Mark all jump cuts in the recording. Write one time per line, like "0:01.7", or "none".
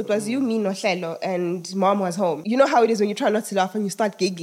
0:02.4